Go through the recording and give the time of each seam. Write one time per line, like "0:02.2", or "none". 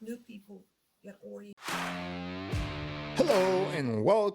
0:01.5